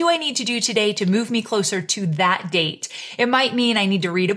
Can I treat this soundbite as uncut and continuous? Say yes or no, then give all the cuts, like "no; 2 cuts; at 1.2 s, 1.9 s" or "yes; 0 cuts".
yes; 0 cuts